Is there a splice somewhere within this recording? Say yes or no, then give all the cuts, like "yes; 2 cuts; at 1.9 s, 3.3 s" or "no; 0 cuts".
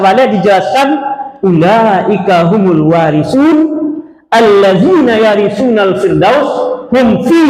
no; 0 cuts